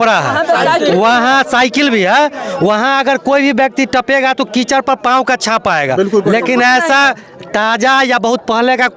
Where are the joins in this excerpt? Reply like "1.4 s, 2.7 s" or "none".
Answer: none